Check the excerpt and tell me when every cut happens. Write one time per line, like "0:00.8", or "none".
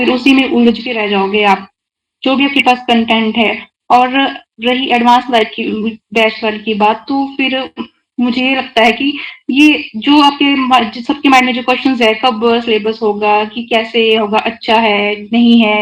none